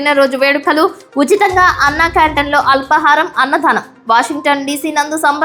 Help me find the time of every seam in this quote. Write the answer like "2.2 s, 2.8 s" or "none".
none